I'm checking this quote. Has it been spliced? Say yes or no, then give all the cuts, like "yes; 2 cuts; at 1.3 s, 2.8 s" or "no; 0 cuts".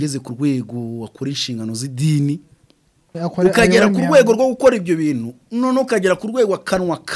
yes; 1 cut; at 3.1 s